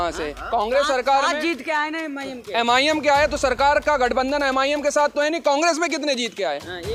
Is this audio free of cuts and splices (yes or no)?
yes